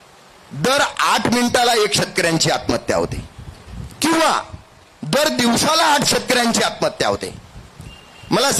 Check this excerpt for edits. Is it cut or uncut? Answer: uncut